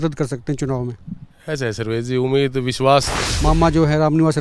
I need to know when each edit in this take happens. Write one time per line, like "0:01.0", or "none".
0:03.2

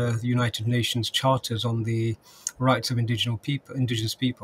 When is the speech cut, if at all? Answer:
none

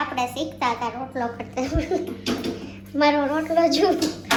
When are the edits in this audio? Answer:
none

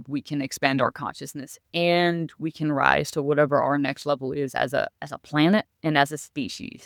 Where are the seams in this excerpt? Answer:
none

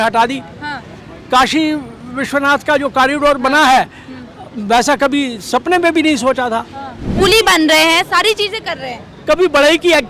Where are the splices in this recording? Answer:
0:07.1

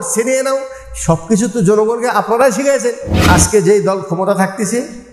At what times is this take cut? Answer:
0:03.1

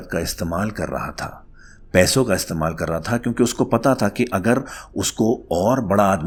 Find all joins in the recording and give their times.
none

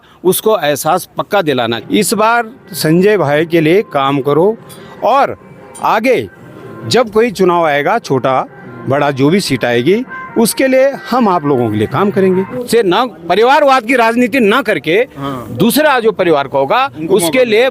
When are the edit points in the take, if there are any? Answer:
0:01.8
0:12.6

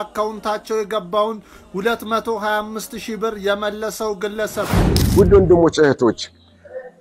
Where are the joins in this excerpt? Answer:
0:04.8

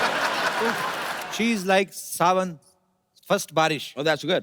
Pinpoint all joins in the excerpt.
0:01.1

